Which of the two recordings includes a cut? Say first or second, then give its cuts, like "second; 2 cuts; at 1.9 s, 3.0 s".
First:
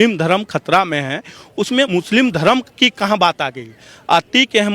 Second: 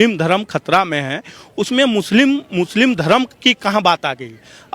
first; 1 cut; at 1.9 s